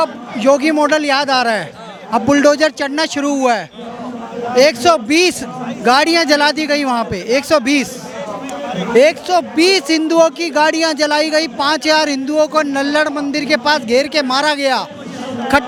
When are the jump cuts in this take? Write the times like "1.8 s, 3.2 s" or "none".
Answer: none